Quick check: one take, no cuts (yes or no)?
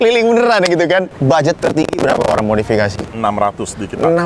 no